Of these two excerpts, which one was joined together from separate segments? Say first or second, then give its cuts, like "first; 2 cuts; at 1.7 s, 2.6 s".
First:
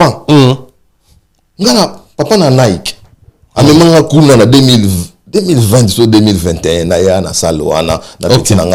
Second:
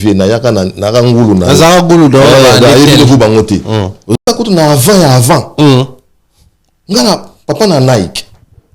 second; 1 cut; at 4.2 s